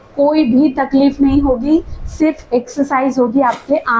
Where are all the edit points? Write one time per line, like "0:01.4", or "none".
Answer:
none

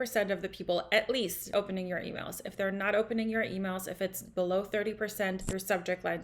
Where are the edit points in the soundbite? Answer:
0:01.5
0:05.4

